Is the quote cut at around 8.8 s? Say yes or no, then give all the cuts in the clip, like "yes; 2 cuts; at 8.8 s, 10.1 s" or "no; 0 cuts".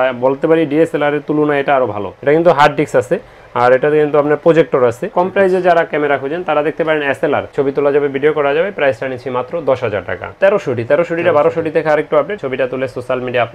no; 5 cuts; at 2.1 s, 5.1 s, 7.5 s, 10.3 s, 12.4 s